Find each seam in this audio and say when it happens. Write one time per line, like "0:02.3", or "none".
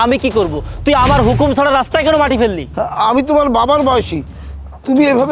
0:02.7